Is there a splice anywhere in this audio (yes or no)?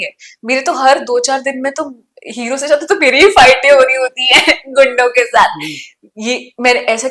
no